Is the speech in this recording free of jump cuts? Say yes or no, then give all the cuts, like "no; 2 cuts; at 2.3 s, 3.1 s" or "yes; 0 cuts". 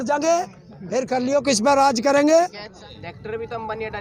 no; 1 cut; at 2.7 s